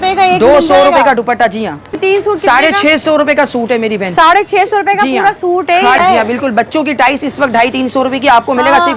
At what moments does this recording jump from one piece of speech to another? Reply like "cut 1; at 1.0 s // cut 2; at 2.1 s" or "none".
cut 1; at 1.9 s // cut 2; at 6.0 s